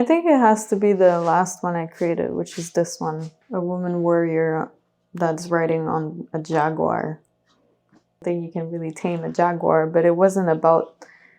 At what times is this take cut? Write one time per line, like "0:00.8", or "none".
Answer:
0:03.3
0:08.2